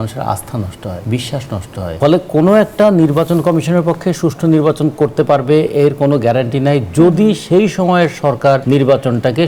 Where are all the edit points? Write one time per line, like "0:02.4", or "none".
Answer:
0:01.9